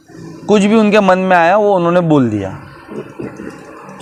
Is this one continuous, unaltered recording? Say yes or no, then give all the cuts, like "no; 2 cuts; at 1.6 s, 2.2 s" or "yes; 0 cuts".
yes; 0 cuts